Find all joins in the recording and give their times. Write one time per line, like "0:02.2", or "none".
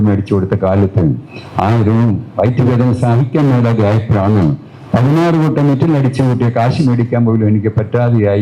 none